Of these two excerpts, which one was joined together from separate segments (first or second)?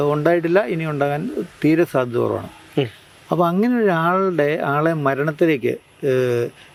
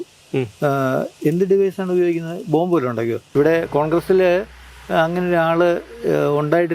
second